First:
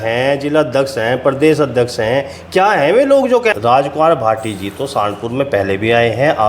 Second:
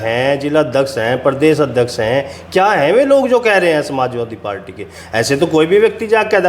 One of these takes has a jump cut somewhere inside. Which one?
first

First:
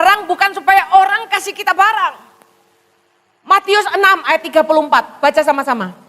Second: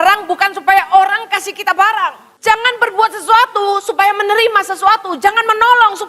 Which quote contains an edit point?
second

